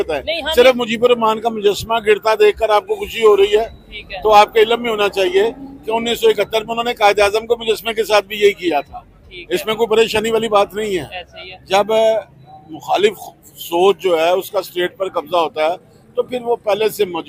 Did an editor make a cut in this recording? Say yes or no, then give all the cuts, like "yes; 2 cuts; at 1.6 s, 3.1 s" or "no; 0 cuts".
no; 0 cuts